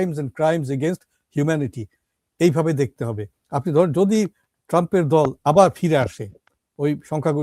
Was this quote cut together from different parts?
yes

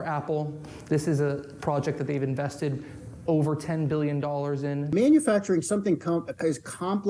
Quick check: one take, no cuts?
no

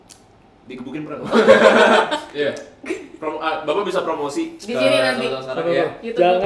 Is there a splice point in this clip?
yes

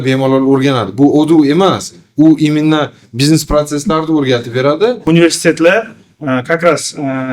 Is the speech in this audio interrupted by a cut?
yes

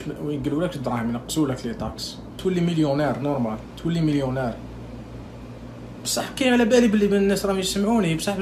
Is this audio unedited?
no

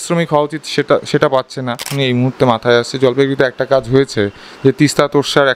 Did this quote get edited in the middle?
yes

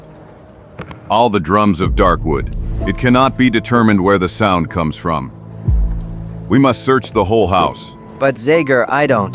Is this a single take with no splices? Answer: no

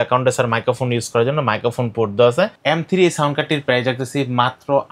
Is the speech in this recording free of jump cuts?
no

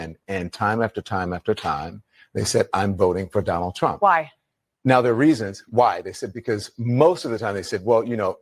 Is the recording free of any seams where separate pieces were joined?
yes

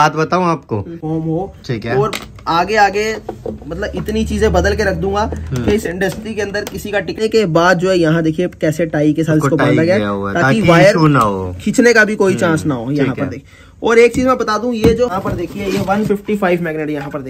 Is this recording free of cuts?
no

